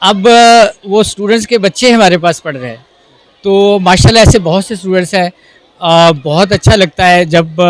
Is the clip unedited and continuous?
yes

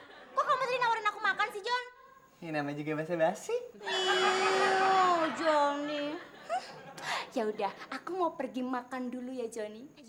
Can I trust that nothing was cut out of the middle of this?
yes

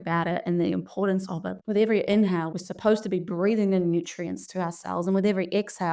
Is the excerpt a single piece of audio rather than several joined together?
no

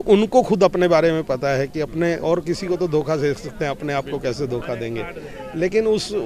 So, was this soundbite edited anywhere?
no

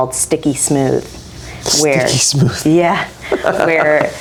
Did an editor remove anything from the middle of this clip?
no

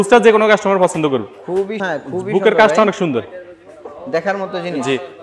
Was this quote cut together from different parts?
yes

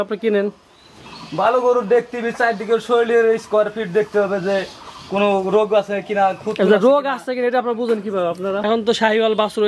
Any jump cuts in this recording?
yes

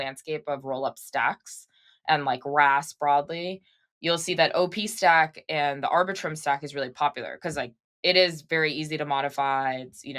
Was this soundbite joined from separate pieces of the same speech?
no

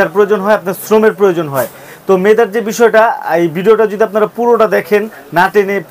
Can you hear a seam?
no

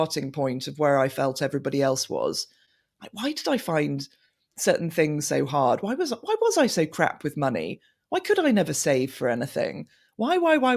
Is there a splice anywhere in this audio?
no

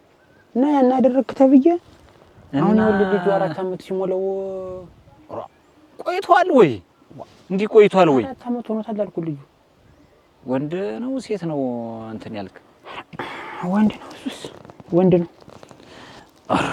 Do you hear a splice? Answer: no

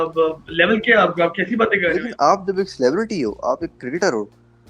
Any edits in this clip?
yes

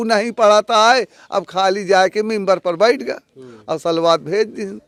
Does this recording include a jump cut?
no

